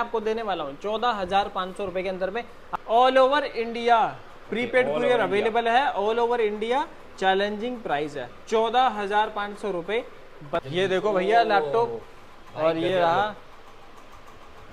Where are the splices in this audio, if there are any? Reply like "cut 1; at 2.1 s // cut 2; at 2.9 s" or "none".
cut 1; at 2.6 s // cut 2; at 10.6 s